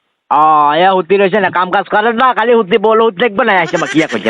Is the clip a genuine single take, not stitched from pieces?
yes; 0 cuts

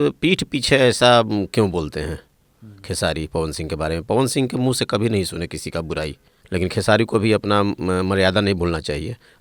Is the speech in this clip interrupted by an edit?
yes; 1 cut; at 6.3 s

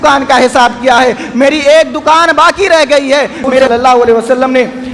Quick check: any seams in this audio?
yes; 1 cut; at 3.7 s

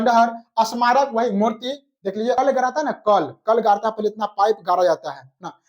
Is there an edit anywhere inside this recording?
yes; 1 cut; at 2.4 s

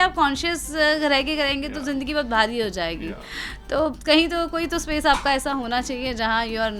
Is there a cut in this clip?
no; 0 cuts

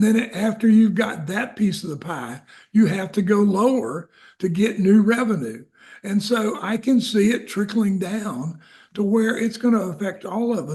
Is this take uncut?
yes; 0 cuts

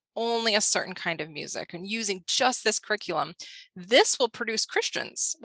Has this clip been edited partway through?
no; 0 cuts

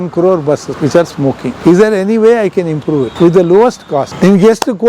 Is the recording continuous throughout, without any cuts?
no; 3 cuts; at 1.1 s, 3.1 s, 4.1 s

